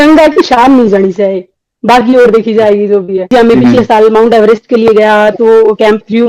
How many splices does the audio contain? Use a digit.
1